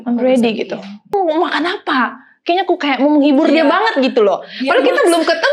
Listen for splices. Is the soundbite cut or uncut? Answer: cut